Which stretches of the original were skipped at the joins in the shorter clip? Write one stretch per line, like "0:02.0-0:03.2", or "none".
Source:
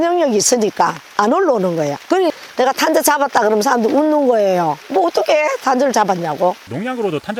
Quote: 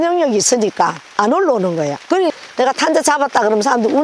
none